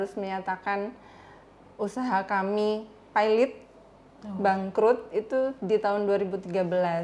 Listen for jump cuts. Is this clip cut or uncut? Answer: uncut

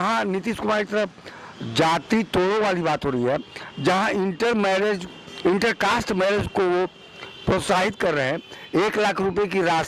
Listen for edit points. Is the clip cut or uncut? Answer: uncut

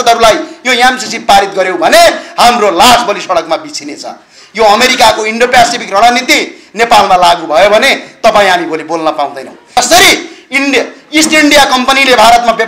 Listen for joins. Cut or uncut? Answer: cut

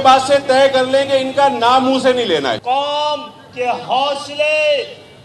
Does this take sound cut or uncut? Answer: cut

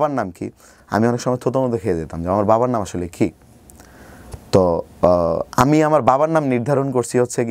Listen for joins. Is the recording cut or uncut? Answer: uncut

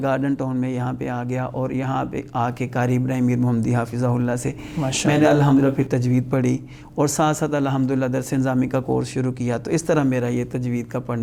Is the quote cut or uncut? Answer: uncut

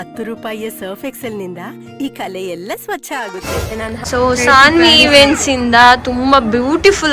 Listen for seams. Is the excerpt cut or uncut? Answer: cut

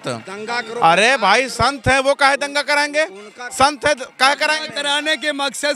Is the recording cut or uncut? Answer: uncut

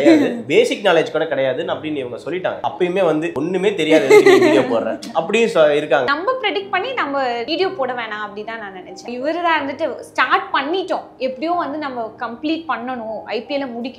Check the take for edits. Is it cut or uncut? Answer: cut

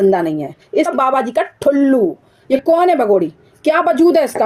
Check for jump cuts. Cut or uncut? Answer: cut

